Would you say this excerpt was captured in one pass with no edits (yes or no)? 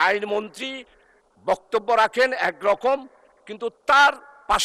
yes